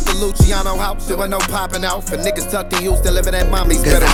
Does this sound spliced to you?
no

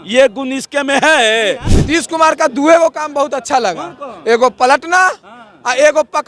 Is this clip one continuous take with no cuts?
no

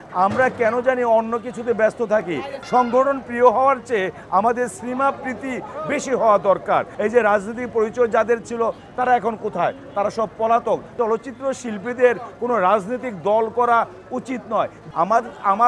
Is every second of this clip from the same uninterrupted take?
no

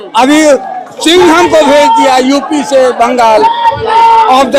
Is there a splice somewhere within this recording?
no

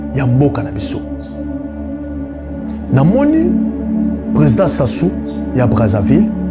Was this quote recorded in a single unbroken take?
yes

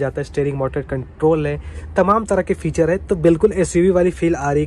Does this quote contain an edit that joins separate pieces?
no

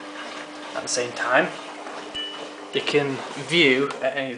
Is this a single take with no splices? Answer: yes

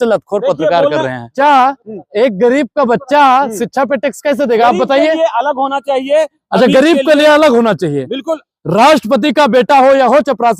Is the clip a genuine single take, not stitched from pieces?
no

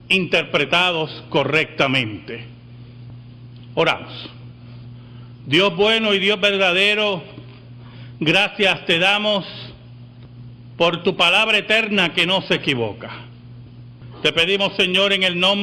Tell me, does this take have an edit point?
yes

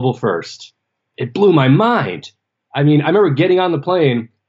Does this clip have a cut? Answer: yes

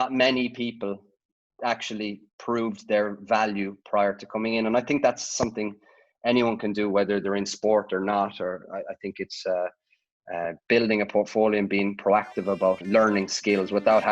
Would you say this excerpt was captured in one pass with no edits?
no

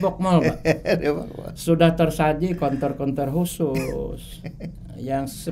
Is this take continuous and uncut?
yes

